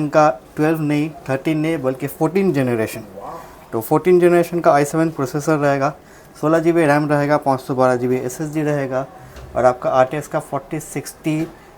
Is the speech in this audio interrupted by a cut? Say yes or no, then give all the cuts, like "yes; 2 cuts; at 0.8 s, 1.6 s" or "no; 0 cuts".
no; 0 cuts